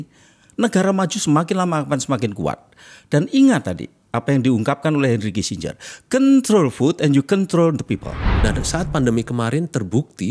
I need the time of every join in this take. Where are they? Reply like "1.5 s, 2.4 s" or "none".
8.3 s